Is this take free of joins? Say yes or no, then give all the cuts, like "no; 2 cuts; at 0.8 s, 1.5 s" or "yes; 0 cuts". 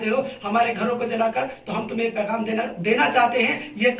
yes; 0 cuts